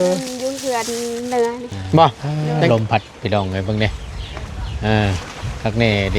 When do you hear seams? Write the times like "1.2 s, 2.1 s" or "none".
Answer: 2.7 s